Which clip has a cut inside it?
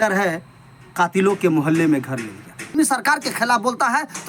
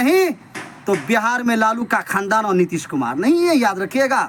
first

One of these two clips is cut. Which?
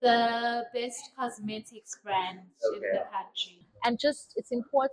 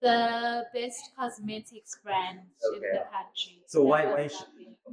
first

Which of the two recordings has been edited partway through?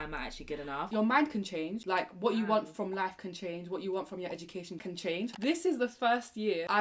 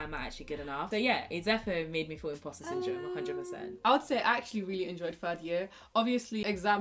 first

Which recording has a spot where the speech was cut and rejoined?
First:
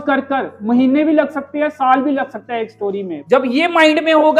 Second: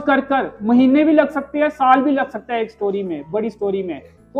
first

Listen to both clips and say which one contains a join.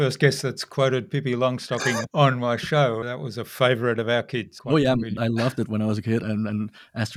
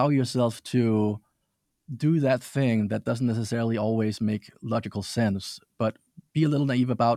first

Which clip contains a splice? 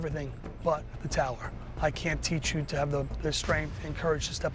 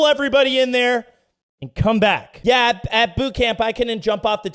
second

